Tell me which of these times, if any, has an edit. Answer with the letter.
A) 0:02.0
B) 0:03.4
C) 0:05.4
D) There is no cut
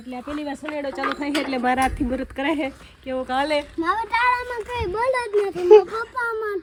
D